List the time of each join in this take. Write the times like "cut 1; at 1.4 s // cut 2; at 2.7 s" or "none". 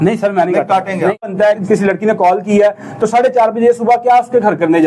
cut 1; at 1.3 s